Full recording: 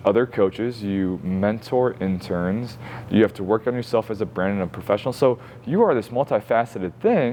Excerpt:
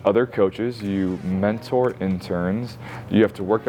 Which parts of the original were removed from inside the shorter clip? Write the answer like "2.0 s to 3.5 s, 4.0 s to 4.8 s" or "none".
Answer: none

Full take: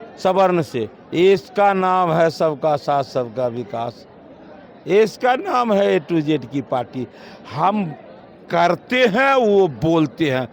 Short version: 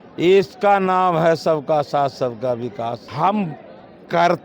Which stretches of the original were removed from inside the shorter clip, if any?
4.0 s to 7.5 s

